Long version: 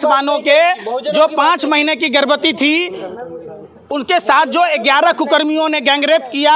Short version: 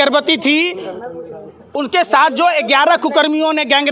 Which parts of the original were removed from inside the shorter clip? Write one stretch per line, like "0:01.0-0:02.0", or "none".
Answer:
none